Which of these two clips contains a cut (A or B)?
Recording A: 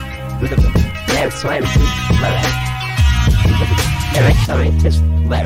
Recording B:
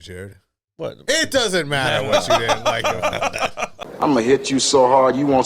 B